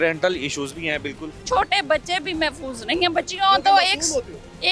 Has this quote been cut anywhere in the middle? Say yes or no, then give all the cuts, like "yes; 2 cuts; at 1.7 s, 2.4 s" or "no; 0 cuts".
yes; 1 cut; at 1.3 s